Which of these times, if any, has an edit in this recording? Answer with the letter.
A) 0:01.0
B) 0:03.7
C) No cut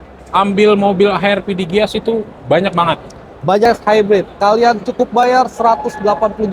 B